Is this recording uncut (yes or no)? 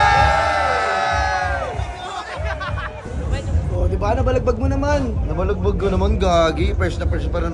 yes